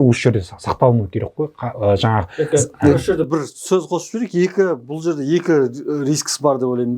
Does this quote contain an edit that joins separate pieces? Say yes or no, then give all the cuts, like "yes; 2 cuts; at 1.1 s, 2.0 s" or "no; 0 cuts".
no; 0 cuts